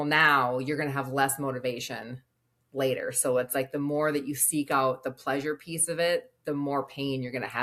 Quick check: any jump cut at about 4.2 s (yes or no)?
no